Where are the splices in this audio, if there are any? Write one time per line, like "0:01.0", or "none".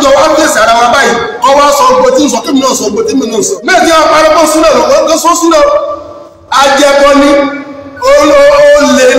0:03.7